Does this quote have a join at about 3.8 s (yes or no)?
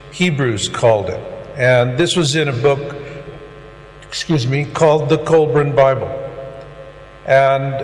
no